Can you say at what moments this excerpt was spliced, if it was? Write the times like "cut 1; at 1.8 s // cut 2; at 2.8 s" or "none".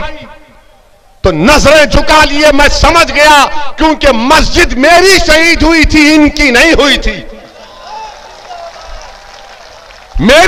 none